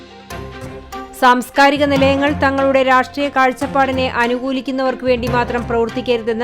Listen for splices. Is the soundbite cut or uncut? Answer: cut